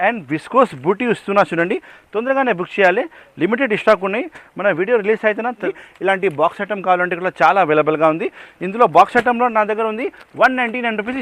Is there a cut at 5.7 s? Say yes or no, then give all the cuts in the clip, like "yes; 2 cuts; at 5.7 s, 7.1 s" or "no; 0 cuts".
yes; 1 cut; at 5.7 s